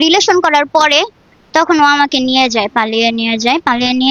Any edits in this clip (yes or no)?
no